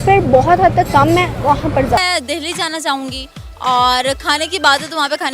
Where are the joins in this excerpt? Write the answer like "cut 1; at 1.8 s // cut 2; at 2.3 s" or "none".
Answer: cut 1; at 2.0 s